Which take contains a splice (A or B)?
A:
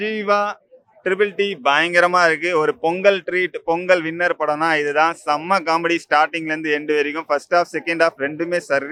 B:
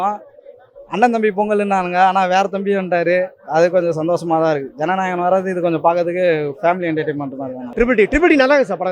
B